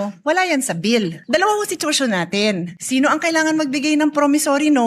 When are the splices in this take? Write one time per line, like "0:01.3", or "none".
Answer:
0:01.2
0:02.7